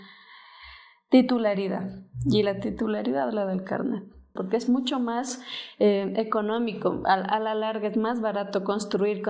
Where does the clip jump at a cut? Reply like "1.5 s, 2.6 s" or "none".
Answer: 4.3 s